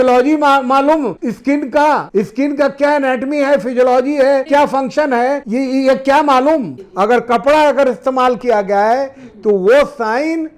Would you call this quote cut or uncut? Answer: cut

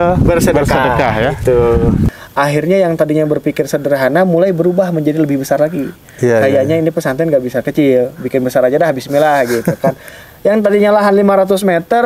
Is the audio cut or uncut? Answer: cut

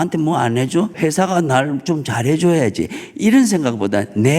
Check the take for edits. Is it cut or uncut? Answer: cut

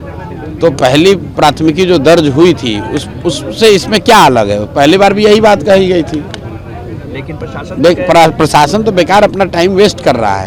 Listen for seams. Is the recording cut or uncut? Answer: uncut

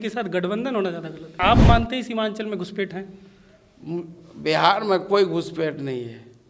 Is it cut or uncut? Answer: cut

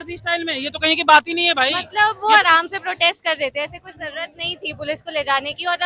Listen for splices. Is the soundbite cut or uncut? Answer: cut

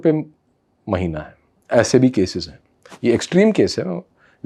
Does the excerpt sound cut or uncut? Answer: uncut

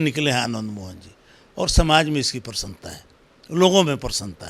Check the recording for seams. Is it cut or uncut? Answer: uncut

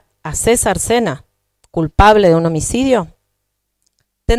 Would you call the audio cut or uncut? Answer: uncut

